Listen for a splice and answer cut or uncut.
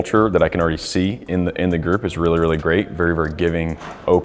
uncut